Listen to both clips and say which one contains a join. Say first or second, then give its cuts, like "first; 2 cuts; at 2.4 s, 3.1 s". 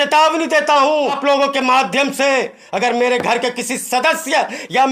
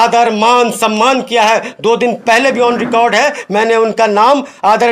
first; 1 cut; at 1.2 s